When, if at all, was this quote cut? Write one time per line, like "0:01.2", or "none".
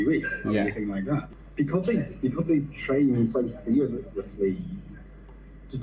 0:01.3